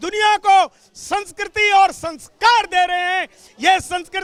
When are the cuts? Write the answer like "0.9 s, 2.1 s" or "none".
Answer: none